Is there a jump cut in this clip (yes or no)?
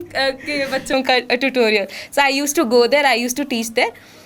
no